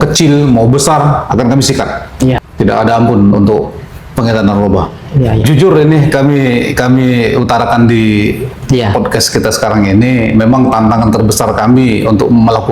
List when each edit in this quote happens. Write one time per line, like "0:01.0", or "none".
0:02.4
0:05.5